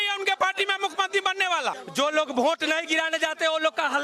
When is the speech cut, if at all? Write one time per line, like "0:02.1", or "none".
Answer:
0:01.8